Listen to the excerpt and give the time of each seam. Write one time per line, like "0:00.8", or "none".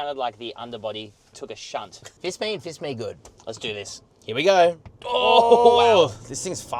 0:02.0
0:04.9